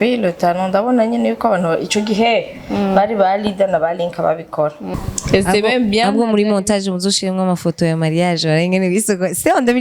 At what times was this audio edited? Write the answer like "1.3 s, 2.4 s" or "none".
4.9 s